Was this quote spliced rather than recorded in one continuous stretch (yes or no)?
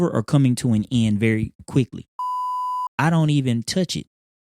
yes